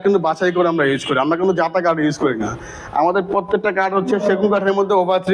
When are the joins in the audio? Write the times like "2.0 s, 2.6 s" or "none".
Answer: none